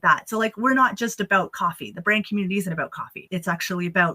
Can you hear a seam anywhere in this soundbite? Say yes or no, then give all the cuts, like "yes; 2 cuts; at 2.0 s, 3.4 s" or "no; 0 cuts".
yes; 1 cut; at 3.2 s